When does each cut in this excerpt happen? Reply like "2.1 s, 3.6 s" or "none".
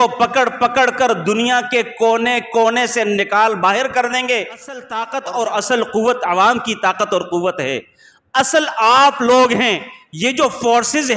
4.9 s

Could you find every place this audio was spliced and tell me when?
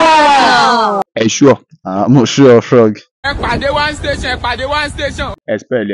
1.0 s

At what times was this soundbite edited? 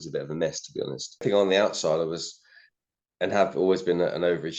1.2 s

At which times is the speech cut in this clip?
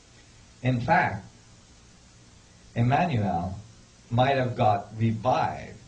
none

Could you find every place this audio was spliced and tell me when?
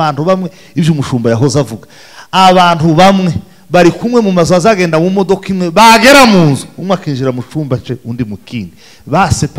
none

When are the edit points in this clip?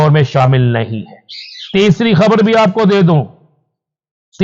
none

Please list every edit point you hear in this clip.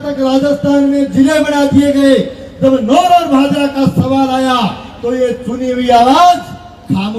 none

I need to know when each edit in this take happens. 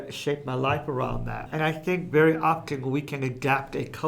1.3 s

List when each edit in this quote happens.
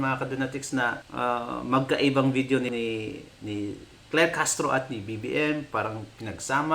1.0 s, 2.7 s

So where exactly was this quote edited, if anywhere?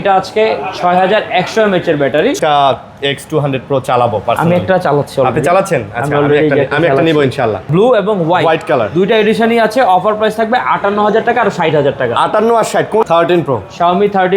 2.4 s, 7.6 s, 13.0 s

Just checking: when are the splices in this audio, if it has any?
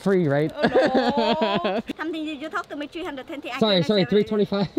1.9 s

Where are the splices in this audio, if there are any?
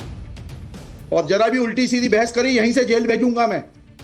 1.0 s

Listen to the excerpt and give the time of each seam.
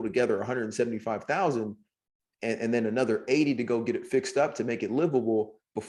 none

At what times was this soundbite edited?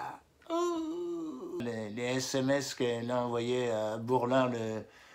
1.6 s

